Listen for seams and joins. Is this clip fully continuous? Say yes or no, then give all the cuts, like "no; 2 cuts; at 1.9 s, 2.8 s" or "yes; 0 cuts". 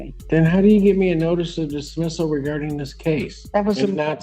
yes; 0 cuts